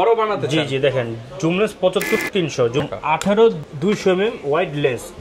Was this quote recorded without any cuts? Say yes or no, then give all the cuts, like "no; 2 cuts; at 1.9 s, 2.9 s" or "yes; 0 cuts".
no; 2 cuts; at 2.7 s, 3.7 s